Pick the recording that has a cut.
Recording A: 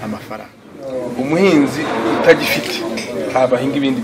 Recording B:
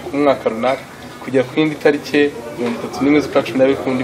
A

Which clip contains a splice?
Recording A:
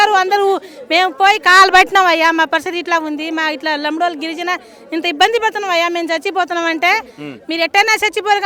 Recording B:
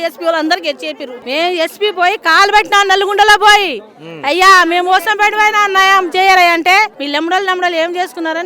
B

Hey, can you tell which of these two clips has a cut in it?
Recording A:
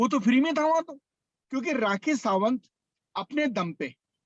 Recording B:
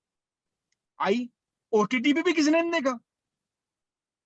A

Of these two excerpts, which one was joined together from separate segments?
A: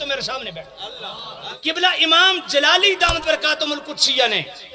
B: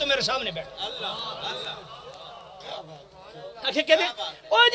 A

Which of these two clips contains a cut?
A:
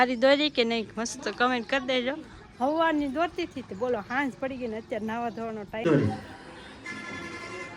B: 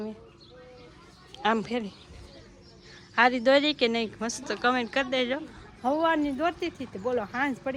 A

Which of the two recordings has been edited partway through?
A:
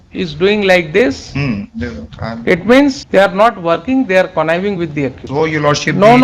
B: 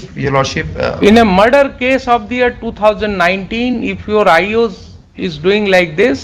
A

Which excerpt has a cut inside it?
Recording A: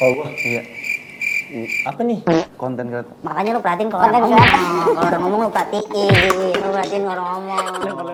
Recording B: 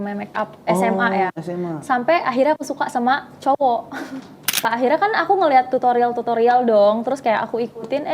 B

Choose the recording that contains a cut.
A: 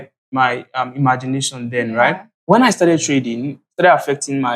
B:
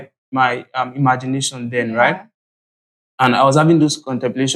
A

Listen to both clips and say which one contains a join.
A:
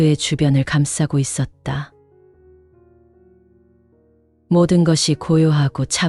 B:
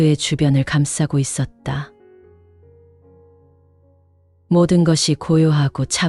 A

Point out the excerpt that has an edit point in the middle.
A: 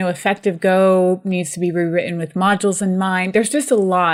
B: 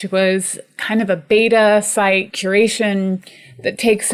B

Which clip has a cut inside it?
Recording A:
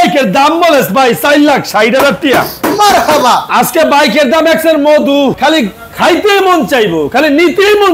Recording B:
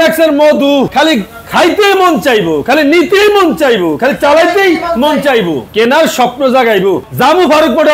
A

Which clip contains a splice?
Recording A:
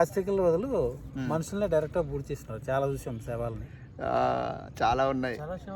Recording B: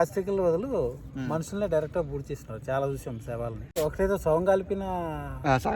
B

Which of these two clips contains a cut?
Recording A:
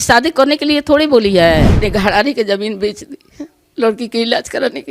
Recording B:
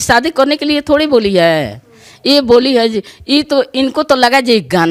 A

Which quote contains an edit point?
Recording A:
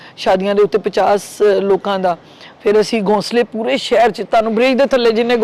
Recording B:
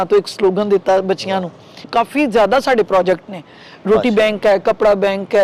B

